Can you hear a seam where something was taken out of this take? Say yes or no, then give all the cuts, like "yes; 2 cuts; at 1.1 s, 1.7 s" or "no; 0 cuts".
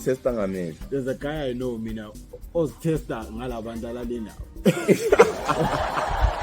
yes; 2 cuts; at 0.8 s, 2.3 s